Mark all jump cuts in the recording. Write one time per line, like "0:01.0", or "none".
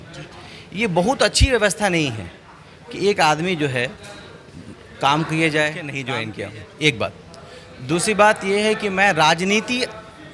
0:06.0